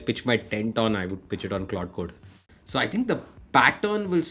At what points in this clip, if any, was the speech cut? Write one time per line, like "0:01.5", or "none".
0:02.4